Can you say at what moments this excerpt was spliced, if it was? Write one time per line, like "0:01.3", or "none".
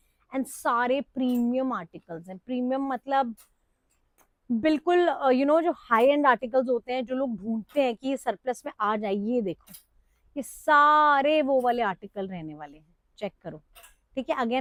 none